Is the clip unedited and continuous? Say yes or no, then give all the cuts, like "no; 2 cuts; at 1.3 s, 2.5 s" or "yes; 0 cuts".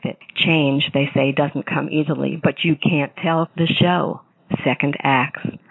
no; 1 cut; at 2.1 s